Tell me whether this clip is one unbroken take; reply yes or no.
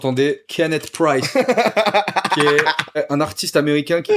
no